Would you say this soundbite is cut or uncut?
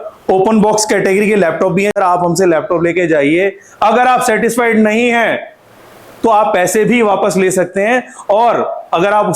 cut